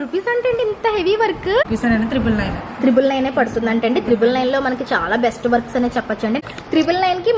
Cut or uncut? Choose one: cut